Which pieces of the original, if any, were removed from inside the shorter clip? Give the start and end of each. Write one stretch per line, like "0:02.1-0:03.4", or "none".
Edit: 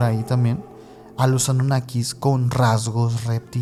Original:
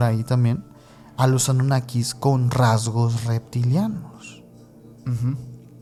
none